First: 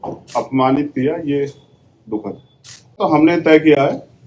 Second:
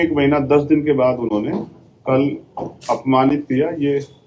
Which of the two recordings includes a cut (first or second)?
first